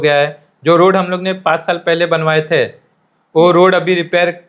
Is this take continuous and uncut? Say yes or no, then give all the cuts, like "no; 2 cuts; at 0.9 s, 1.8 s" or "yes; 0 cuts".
yes; 0 cuts